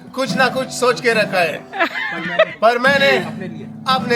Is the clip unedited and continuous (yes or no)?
yes